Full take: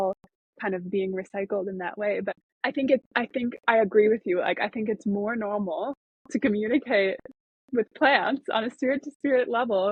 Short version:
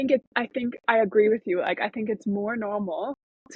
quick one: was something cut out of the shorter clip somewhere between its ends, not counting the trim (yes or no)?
no